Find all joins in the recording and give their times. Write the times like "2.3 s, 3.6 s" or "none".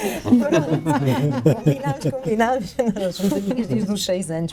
none